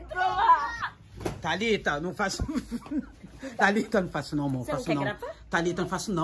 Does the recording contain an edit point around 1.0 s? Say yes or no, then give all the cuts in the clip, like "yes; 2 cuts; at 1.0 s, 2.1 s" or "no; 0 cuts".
yes; 1 cut; at 1.0 s